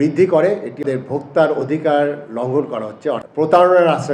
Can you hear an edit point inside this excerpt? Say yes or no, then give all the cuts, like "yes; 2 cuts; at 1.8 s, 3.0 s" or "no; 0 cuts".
yes; 2 cuts; at 0.8 s, 3.2 s